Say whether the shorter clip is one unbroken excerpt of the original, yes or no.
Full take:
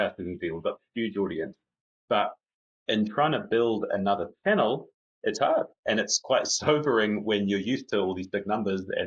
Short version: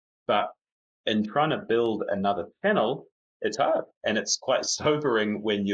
yes